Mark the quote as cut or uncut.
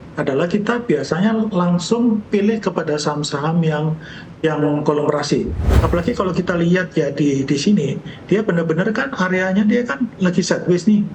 cut